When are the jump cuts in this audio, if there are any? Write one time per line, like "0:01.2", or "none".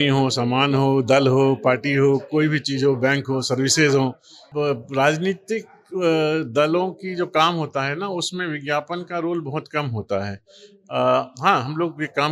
0:04.4